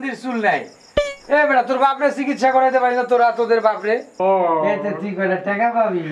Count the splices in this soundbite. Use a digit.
1